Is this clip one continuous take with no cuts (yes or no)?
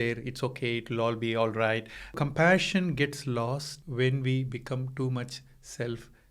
no